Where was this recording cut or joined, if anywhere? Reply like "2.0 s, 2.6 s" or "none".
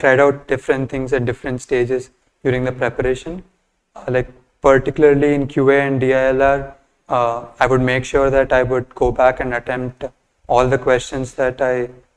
none